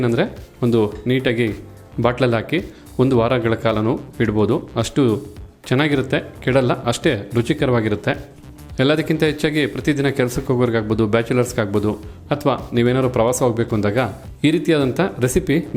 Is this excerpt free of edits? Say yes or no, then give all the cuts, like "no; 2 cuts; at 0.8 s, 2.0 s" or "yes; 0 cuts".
yes; 0 cuts